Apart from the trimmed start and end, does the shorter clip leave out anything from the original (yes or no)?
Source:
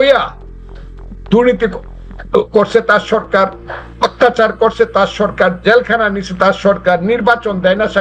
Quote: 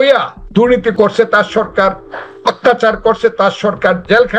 yes